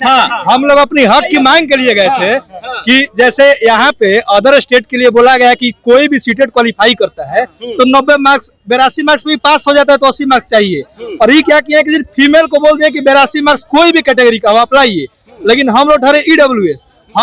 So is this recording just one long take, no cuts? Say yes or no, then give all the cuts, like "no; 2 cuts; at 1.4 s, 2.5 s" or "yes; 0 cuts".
yes; 0 cuts